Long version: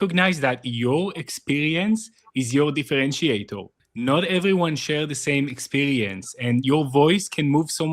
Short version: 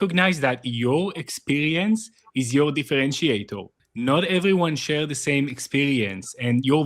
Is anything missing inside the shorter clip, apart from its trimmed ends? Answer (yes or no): no